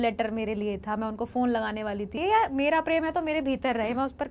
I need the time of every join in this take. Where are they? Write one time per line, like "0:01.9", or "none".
0:02.2